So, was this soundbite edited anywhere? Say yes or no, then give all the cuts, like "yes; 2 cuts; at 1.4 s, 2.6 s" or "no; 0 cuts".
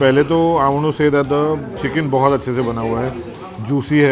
no; 0 cuts